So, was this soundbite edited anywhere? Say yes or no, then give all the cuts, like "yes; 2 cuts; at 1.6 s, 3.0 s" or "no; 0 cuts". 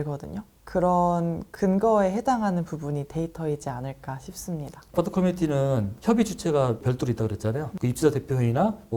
yes; 1 cut; at 4.9 s